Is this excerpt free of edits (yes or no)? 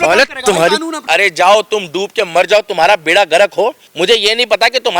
no